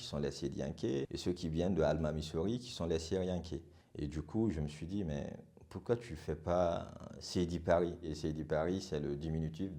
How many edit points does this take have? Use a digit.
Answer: 2